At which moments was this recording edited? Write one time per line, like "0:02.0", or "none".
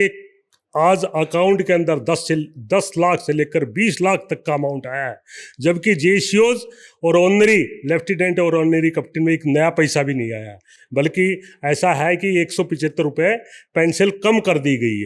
none